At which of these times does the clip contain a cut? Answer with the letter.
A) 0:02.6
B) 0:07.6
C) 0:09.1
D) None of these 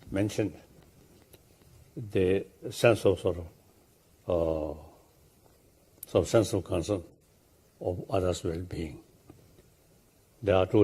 B